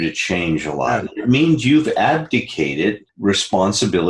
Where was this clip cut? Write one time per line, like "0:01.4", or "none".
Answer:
0:03.1